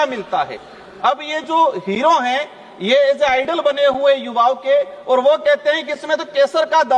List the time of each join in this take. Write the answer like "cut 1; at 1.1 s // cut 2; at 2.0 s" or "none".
none

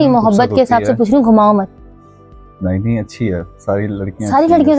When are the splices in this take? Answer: none

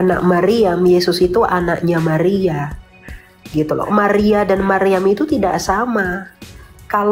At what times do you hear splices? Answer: none

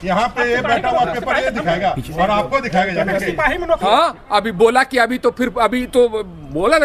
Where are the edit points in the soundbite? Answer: cut 1; at 3.8 s

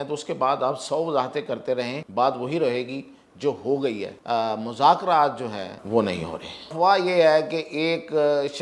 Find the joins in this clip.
cut 1; at 2.0 s // cut 2; at 4.1 s // cut 3; at 5.8 s // cut 4; at 6.7 s

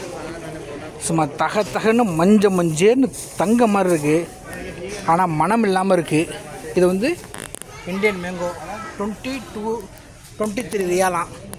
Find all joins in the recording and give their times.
none

